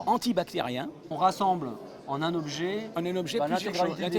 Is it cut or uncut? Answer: cut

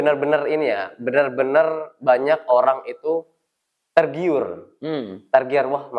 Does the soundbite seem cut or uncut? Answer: uncut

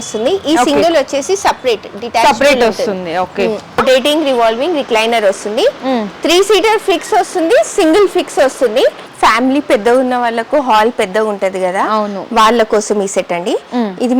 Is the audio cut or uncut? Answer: cut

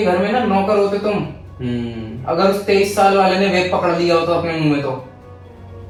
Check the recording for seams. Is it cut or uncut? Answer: uncut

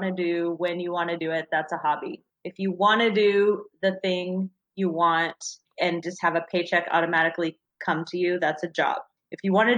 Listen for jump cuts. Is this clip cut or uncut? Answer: cut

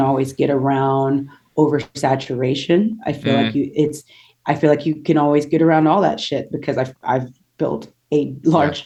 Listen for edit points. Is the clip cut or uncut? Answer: uncut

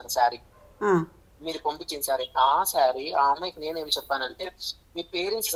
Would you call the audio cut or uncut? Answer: uncut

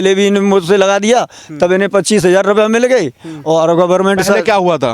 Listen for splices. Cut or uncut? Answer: uncut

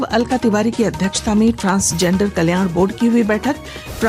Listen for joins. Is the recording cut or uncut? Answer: uncut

